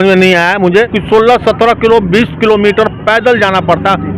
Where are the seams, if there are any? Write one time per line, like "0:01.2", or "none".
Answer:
0:01.0